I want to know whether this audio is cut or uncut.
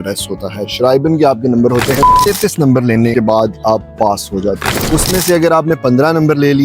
cut